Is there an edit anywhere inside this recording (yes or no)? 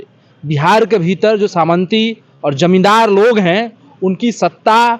no